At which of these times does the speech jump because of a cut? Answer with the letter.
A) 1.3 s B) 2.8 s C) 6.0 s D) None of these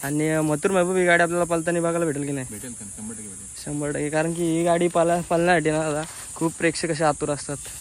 D